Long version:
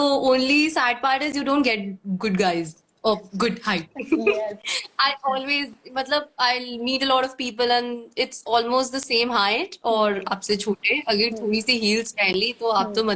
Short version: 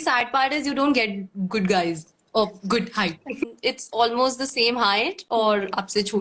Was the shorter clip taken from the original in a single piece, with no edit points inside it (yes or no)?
no